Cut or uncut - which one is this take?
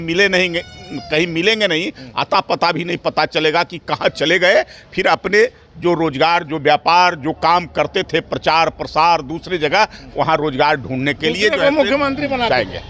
uncut